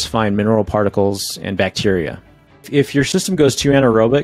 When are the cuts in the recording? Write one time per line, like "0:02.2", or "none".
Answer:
0:02.7